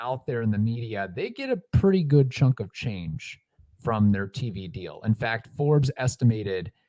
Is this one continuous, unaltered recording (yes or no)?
yes